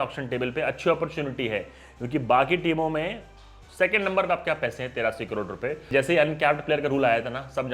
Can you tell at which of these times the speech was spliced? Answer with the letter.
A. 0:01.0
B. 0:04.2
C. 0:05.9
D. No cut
C